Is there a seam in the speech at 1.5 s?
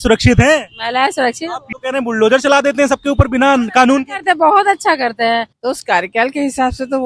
yes; 2 cuts; at 1.5 s, 5.5 s

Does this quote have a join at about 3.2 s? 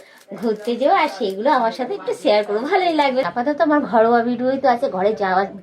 yes; 1 cut; at 3.2 s

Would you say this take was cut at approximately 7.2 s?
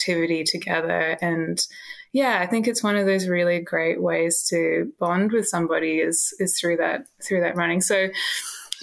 no; 0 cuts

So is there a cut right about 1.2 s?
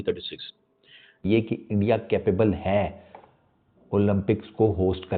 yes; 1 cut; at 1.2 s

